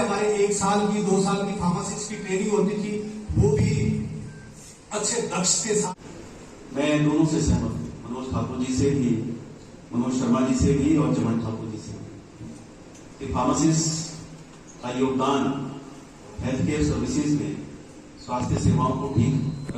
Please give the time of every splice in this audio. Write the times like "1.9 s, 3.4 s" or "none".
5.9 s